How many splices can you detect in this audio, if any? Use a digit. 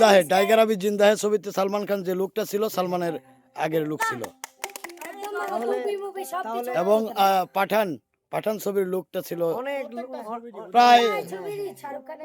0